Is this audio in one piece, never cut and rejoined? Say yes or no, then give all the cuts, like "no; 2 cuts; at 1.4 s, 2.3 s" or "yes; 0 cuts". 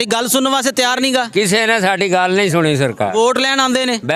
yes; 0 cuts